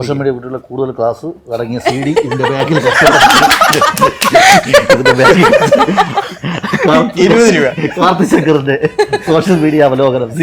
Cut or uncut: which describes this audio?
uncut